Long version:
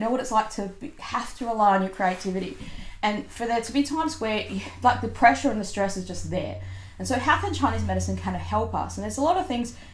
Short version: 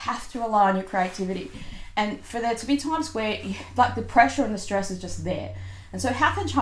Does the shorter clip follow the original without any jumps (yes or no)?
yes